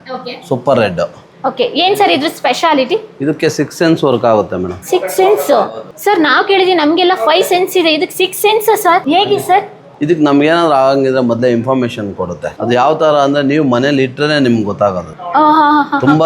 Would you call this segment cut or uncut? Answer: uncut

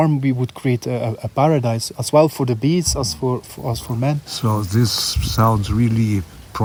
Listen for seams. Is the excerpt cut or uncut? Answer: uncut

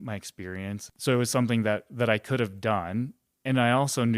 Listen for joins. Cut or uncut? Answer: cut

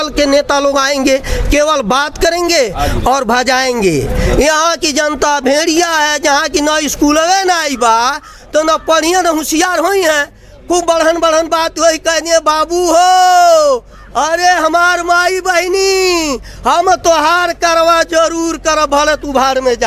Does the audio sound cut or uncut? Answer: uncut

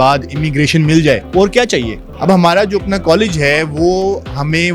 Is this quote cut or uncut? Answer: cut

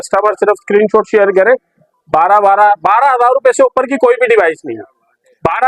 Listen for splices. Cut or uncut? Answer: uncut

